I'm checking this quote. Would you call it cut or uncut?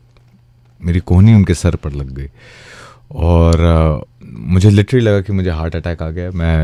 uncut